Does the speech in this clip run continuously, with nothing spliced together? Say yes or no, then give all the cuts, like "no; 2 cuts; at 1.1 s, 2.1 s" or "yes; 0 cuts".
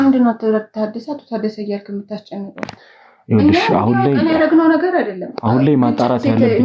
yes; 0 cuts